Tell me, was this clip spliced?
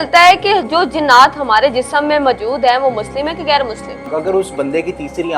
yes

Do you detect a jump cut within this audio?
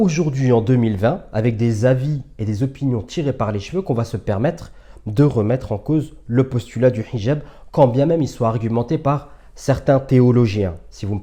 no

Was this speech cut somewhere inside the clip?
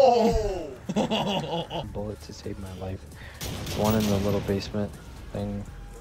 yes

